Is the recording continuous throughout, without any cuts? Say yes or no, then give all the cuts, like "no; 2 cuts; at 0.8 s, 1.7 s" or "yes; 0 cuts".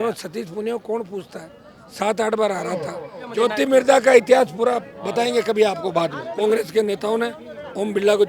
no; 2 cuts; at 3.3 s, 6.2 s